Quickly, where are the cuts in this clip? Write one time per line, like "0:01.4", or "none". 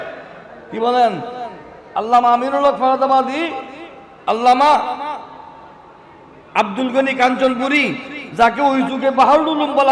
none